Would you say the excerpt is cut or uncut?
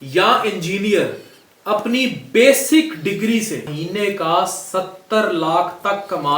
cut